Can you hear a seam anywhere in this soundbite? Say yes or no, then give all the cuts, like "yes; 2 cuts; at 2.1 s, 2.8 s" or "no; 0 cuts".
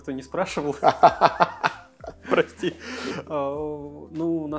no; 0 cuts